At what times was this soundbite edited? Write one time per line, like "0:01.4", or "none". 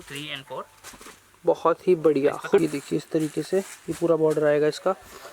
0:02.6